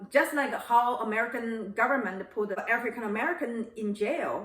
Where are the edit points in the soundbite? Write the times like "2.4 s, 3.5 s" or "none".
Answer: 2.6 s